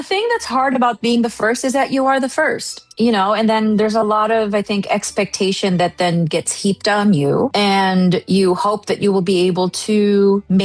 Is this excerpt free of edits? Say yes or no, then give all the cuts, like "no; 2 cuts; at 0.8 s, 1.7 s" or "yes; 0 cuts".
yes; 0 cuts